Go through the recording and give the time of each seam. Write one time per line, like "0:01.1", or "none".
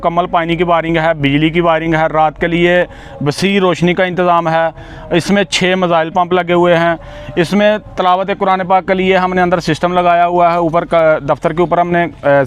none